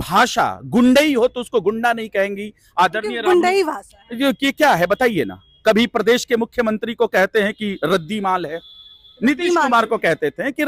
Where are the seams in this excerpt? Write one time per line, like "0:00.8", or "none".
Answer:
none